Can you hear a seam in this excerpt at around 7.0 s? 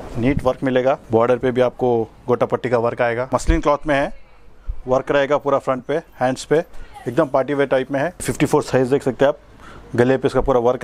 no; 3 cuts; at 1.0 s, 3.3 s, 8.2 s

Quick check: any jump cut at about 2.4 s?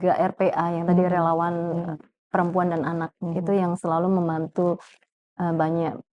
no; 0 cuts

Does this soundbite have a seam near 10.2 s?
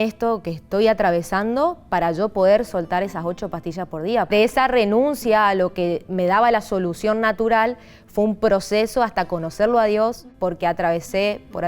yes; 2 cuts; at 4.3 s, 10.2 s

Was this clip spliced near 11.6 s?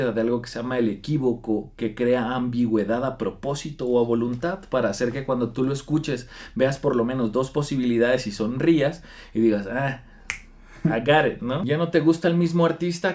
yes; 1 cut; at 11.6 s

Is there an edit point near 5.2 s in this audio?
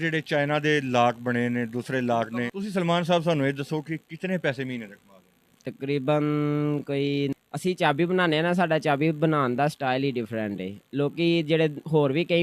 no; 2 cuts; at 2.5 s, 7.3 s

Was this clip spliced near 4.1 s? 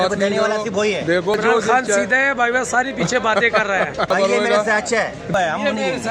yes; 3 cuts; at 1.3 s, 4.1 s, 5.3 s

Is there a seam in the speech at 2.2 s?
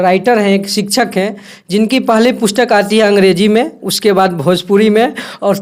no; 0 cuts

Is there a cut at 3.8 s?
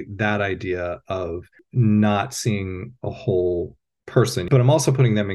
no; 1 cut; at 1.6 s

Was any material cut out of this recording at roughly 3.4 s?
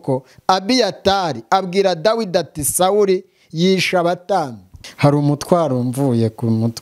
no; 1 cut; at 4.8 s

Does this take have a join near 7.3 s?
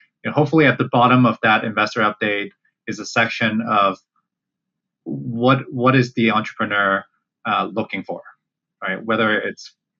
no; 0 cuts

